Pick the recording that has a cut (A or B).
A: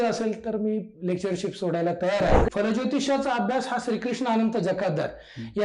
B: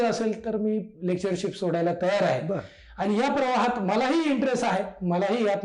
A